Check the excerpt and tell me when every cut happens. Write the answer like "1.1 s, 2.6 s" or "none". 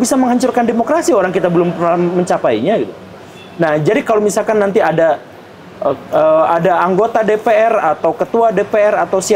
none